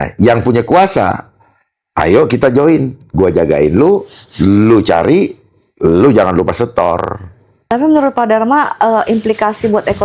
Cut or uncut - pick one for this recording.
cut